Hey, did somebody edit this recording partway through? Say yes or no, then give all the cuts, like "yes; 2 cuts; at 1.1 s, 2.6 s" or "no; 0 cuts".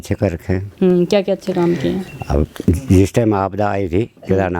no; 0 cuts